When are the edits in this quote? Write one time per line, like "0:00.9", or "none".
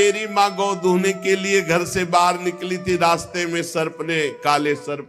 none